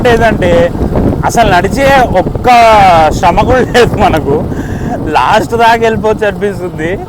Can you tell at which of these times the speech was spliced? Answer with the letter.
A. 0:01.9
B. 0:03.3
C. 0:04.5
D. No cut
D